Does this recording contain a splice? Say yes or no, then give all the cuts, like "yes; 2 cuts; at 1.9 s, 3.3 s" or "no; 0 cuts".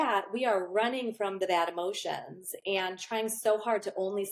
no; 0 cuts